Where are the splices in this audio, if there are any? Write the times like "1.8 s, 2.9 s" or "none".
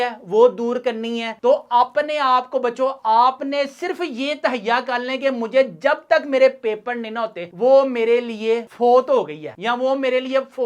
1.3 s

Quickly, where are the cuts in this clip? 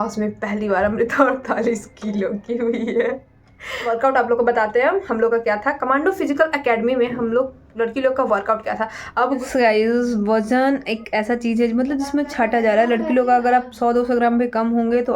3.8 s, 9.4 s

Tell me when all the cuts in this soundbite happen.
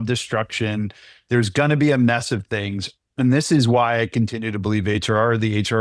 none

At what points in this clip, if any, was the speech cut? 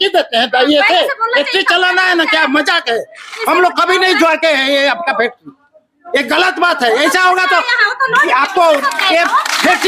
none

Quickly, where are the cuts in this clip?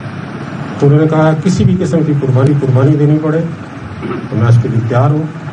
none

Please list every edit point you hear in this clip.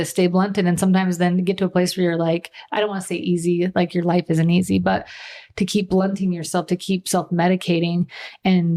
none

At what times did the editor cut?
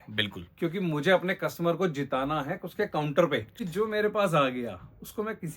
3.5 s

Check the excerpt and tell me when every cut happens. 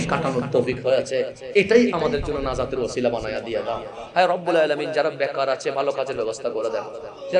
4.0 s

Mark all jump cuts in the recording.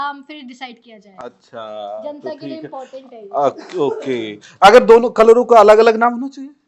none

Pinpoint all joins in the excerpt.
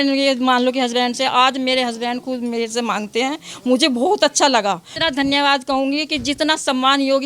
4.9 s

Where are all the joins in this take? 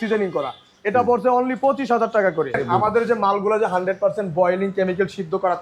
2.6 s

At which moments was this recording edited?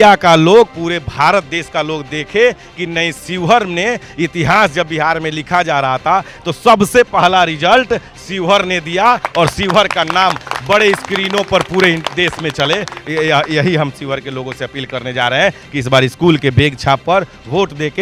none

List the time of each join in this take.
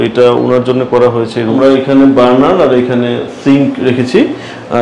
1.5 s

